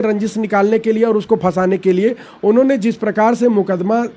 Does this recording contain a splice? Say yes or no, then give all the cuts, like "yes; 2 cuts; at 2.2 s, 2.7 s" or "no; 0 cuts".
no; 0 cuts